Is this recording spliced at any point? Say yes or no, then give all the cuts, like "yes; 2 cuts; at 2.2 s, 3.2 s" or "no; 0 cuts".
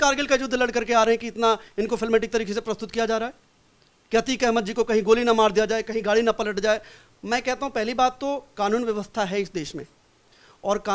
no; 0 cuts